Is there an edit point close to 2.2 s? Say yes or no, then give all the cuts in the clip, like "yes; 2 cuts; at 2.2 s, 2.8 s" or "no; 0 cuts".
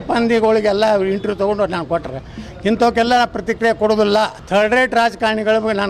no; 1 cut; at 4.4 s